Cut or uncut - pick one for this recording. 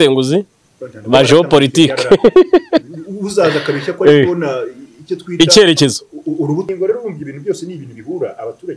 cut